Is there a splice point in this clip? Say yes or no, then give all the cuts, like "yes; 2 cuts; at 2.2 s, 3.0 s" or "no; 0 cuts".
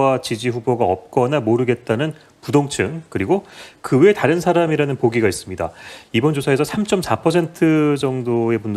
no; 0 cuts